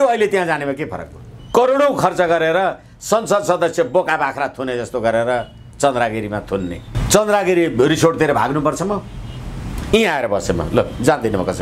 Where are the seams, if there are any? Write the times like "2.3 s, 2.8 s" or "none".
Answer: 1.4 s, 6.9 s